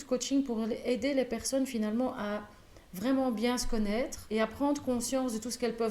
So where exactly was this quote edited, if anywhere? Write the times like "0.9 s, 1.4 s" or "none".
4.2 s